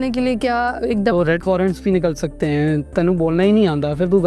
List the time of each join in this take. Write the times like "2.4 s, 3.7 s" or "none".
2.8 s